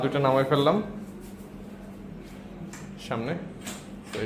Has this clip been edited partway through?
no; 0 cuts

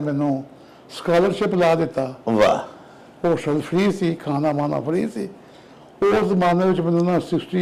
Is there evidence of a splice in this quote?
no; 0 cuts

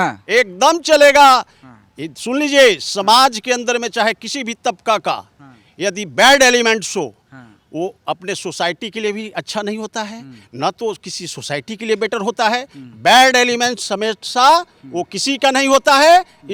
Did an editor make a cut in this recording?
no; 0 cuts

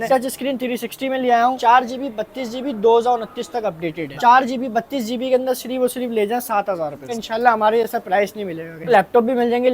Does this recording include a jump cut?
yes; 4 cuts; at 1.6 s, 4.1 s, 7.2 s, 8.9 s

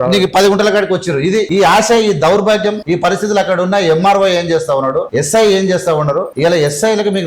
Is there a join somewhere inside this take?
yes; 4 cuts; at 1.5 s, 2.8 s, 5.1 s, 6.3 s

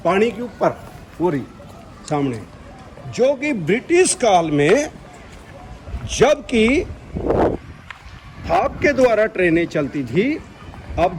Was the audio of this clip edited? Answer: no; 0 cuts

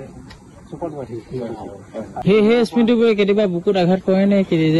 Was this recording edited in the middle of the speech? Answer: yes; 1 cut; at 2.1 s

